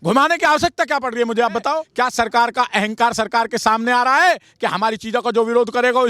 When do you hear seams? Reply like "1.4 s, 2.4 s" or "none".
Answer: 1.9 s